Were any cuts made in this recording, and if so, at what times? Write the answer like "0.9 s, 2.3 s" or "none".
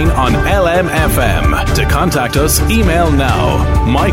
none